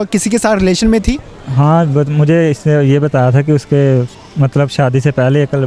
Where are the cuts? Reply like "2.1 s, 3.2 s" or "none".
none